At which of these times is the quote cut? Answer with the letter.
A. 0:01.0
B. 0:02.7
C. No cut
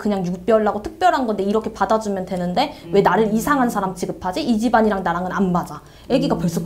C